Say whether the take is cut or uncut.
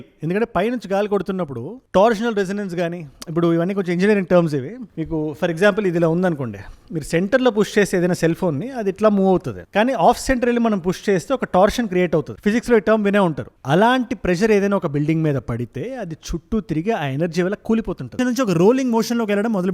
uncut